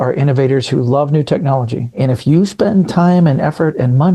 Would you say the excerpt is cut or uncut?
cut